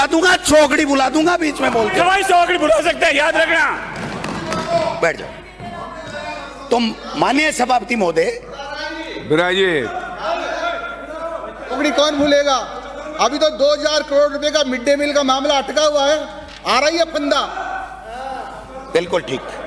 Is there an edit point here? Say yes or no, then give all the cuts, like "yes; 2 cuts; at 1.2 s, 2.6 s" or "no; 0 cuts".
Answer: no; 0 cuts